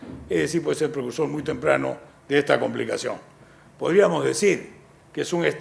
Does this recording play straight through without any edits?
no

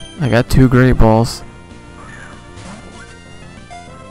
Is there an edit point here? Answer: yes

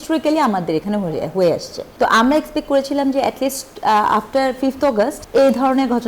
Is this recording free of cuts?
no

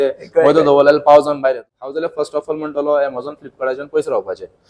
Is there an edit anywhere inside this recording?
yes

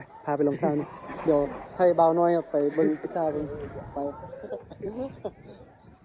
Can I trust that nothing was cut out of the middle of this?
yes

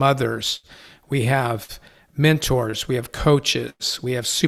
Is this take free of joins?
yes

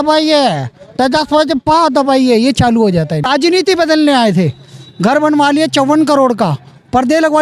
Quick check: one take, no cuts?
no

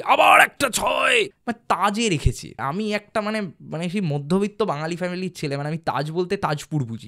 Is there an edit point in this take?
yes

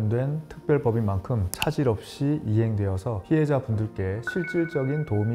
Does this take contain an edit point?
no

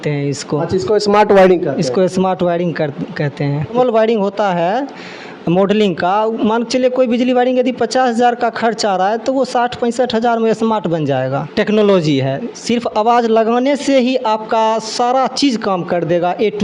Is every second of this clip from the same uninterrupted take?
no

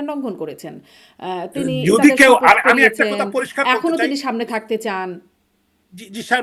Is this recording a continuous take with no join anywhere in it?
yes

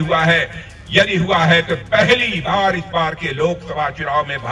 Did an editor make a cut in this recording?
no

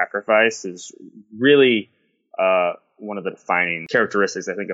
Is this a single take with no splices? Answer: no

